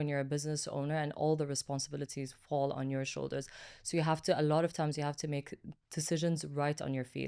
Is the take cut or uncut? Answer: uncut